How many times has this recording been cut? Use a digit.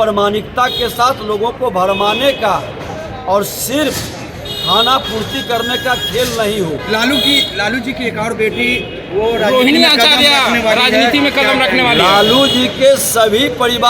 0